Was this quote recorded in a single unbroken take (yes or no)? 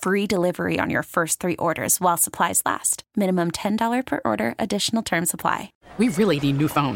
no